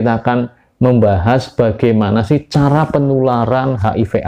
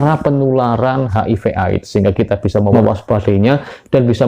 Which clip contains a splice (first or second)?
second